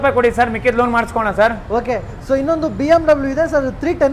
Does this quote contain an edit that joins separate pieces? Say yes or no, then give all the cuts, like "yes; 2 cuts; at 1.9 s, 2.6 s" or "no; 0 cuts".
no; 0 cuts